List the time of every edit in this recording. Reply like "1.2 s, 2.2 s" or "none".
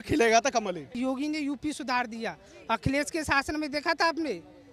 0.9 s